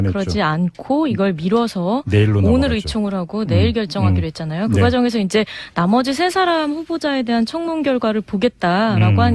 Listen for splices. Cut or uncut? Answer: uncut